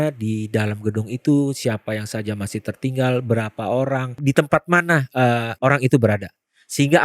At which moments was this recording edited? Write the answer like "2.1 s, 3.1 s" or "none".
4.2 s, 5.5 s